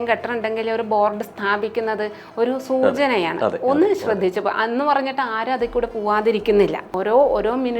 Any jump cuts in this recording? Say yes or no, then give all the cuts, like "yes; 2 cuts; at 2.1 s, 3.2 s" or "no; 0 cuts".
yes; 1 cut; at 6.9 s